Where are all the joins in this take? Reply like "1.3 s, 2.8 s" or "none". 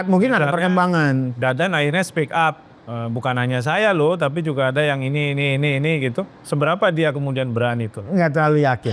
none